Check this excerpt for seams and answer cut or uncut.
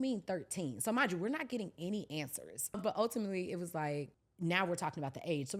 cut